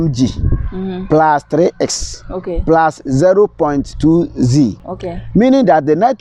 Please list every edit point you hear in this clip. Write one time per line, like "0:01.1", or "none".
none